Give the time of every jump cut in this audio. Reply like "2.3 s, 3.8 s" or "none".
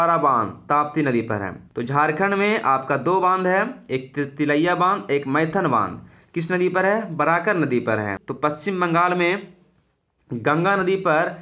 1.6 s, 8.2 s